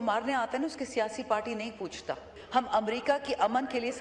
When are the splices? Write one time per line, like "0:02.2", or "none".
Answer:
0:02.3